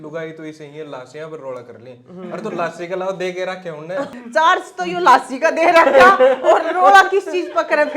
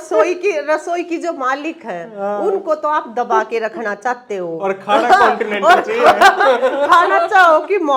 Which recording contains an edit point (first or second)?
first